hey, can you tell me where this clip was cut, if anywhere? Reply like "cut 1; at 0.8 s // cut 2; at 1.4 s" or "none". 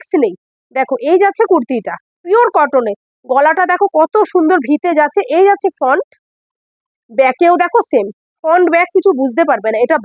none